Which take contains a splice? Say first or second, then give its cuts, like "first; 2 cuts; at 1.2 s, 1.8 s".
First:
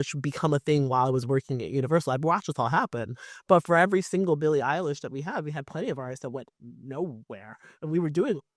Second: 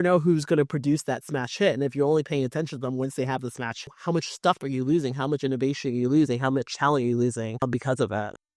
second; 2 cuts; at 3.7 s, 7.6 s